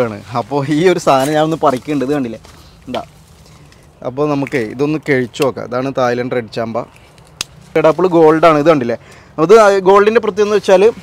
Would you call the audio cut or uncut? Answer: cut